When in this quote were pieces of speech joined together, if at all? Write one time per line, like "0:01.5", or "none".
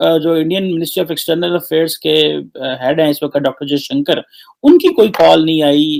none